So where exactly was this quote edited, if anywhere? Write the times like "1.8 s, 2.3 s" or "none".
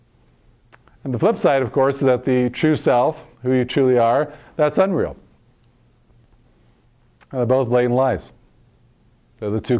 none